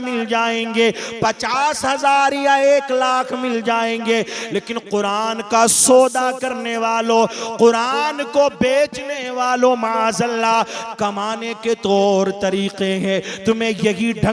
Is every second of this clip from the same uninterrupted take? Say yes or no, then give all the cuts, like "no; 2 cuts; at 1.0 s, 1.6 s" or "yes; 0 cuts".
yes; 0 cuts